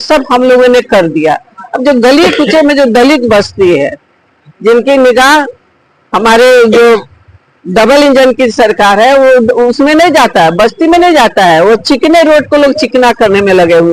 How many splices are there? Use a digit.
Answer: 0